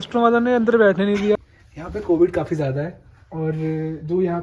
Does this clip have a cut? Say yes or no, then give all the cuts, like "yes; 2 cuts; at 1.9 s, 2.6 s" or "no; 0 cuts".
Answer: yes; 1 cut; at 1.3 s